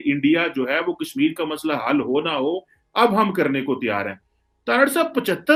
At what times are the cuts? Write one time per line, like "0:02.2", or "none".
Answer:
none